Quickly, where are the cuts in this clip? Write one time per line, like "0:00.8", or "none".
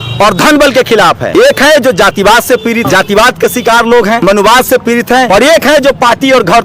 0:01.2
0:02.8
0:04.2
0:05.3